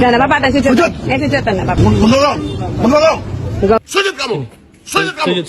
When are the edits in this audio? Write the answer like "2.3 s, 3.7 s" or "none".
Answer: 1.8 s, 3.7 s